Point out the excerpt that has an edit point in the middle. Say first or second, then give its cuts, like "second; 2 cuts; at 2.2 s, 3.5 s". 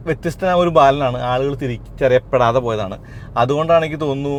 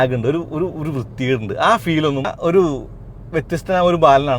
second; 1 cut; at 2.3 s